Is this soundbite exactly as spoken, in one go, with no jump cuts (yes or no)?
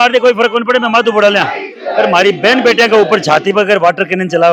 yes